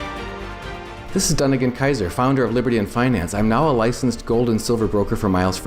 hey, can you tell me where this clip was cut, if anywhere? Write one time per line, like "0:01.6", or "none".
0:00.9